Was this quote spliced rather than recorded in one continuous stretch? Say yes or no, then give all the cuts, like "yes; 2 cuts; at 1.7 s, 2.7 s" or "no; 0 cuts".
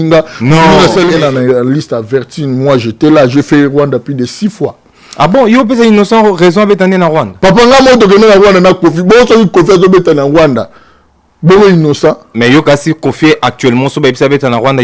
yes; 1 cut; at 1.1 s